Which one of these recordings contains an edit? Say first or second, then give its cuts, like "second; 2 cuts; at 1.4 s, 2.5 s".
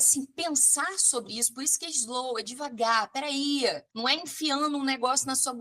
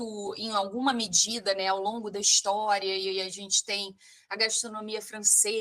first; 1 cut; at 3.9 s